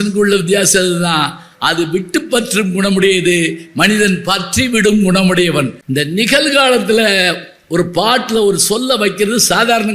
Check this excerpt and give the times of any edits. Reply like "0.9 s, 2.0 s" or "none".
5.8 s